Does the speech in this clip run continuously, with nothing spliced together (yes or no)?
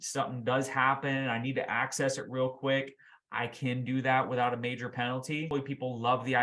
no